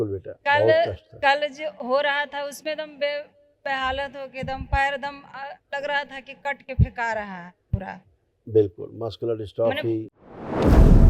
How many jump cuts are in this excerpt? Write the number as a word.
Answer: one